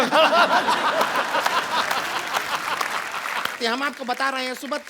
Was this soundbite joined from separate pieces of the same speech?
yes; 1 cut; at 3.6 s

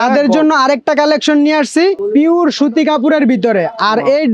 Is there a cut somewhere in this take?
yes; 1 cut; at 2.0 s

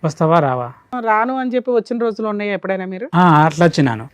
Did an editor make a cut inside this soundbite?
yes; 1 cut; at 0.9 s

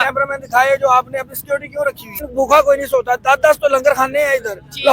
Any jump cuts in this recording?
yes; 1 cut; at 2.2 s

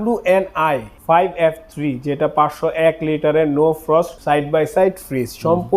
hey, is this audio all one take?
no; 2 cuts; at 0.9 s, 4.2 s

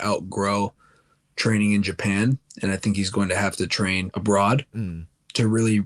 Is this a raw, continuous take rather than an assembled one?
yes; 0 cuts

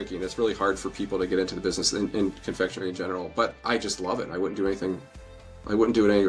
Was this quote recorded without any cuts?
yes; 0 cuts

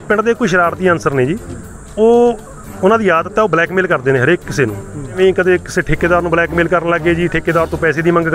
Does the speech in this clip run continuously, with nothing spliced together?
no; 1 cut; at 5.2 s

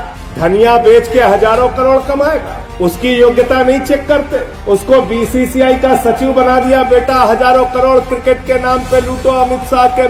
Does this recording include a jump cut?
no; 0 cuts

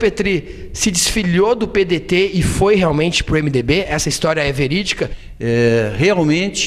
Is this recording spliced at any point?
yes; 1 cut; at 5.2 s

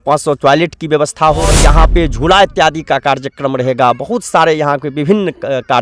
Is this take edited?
yes; 1 cut; at 1.6 s

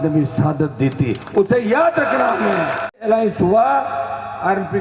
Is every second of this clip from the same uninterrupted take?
no; 1 cut; at 3.0 s

